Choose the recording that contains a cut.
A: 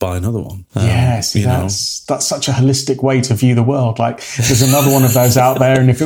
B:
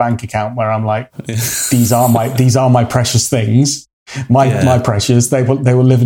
A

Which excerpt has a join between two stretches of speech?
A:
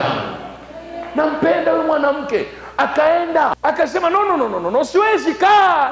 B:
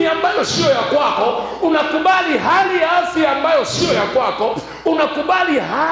A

